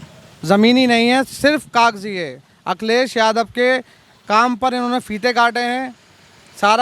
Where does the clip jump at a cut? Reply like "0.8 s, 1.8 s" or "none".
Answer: none